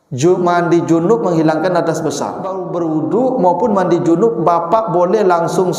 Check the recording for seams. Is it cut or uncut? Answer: cut